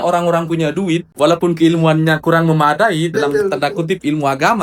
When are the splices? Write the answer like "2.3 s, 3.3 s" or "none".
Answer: 1.1 s